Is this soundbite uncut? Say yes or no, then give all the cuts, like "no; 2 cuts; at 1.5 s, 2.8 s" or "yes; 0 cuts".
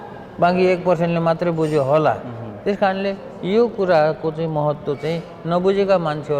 yes; 0 cuts